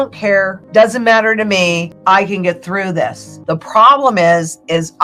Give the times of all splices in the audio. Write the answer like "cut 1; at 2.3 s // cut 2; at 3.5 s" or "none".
cut 1; at 3.3 s